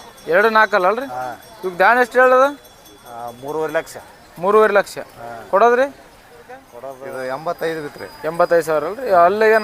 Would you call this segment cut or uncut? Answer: cut